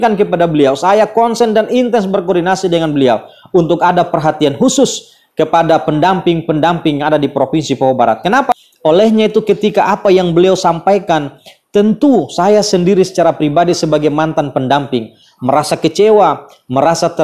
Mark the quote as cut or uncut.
cut